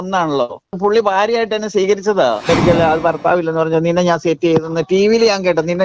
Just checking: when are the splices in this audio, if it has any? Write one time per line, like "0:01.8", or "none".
0:00.7
0:02.4